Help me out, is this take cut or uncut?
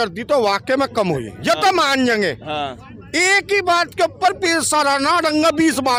uncut